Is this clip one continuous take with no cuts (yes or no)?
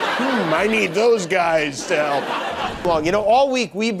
no